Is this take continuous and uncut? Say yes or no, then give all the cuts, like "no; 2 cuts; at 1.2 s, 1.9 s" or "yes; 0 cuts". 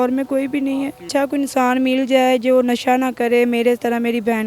no; 1 cut; at 1.1 s